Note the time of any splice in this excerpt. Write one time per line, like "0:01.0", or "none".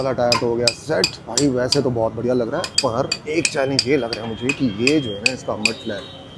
none